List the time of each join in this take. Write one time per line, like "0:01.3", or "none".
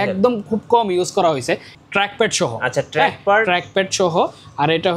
0:01.7